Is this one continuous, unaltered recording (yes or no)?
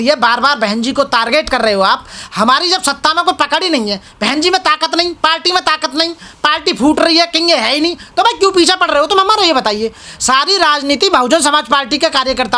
yes